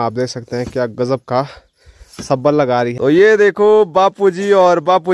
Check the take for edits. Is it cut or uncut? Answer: cut